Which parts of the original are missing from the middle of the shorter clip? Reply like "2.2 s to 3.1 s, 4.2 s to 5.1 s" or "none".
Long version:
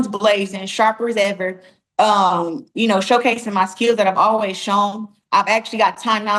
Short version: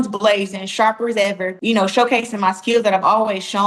1.5 s to 2.7 s